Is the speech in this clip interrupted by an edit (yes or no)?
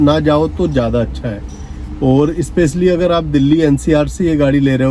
no